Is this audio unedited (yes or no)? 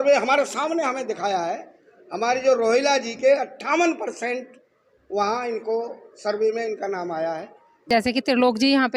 no